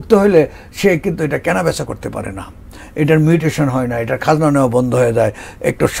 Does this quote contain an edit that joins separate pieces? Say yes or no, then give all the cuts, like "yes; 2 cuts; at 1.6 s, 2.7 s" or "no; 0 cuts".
no; 0 cuts